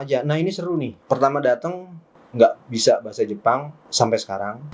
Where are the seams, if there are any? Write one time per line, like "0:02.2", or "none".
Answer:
0:00.9